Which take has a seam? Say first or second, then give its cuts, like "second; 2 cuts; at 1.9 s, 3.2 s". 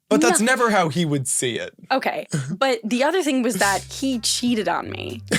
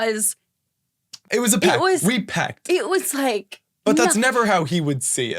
second; 1 cut; at 1.3 s